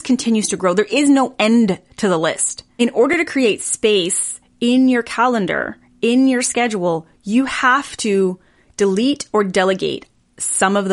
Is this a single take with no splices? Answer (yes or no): yes